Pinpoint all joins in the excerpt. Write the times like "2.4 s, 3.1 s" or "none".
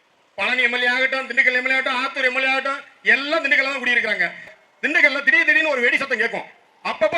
4.5 s

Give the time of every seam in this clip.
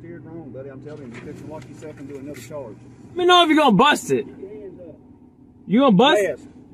3.2 s

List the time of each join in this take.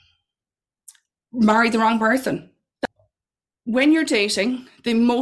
2.7 s

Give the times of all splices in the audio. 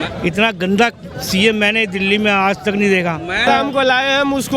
3.5 s

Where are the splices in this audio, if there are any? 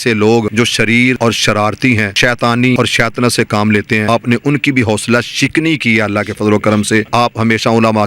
0.8 s, 2.1 s, 2.8 s, 4.1 s, 7.1 s

